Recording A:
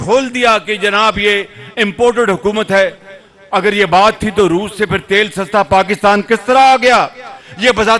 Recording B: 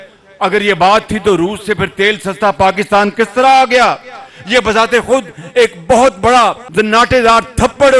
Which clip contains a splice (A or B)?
B